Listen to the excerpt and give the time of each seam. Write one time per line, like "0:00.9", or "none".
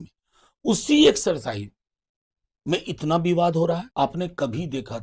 0:03.9

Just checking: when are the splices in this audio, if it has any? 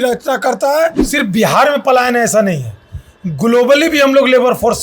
0:01.0

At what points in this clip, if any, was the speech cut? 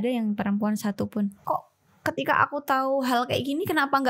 0:01.4

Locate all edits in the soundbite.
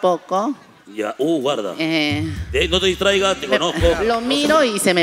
0:04.0

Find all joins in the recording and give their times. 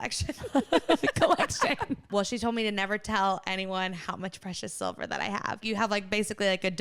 0:02.1
0:05.6

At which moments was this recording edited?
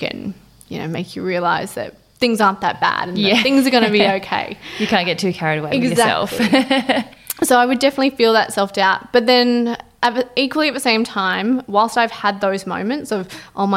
none

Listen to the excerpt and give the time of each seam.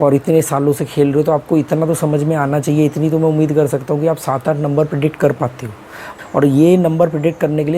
0:06.0

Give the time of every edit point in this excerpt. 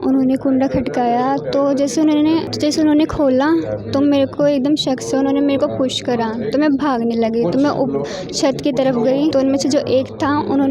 0:02.5
0:09.3

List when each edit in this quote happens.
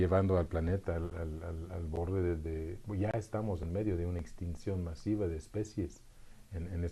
0:01.9

